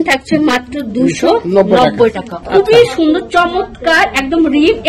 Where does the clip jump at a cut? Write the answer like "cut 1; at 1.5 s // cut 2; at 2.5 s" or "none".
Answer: cut 1; at 2.4 s